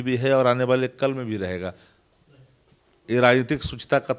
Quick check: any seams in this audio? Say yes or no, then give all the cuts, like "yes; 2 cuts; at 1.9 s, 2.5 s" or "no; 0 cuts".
no; 0 cuts